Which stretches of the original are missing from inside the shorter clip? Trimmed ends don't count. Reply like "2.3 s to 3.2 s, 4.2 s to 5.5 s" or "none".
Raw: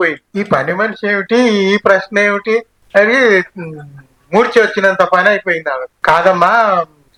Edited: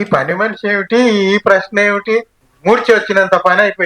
2.8 s to 4.0 s